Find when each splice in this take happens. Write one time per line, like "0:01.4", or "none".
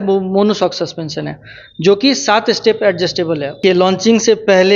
0:03.6